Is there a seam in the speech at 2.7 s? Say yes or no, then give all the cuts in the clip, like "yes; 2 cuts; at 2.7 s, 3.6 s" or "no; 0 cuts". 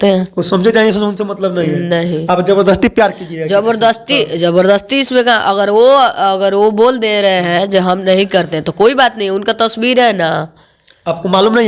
no; 0 cuts